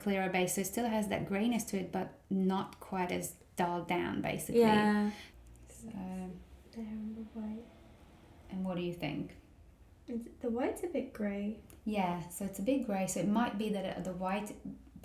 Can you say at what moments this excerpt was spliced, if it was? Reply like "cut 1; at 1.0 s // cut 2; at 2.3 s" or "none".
cut 1; at 5.3 s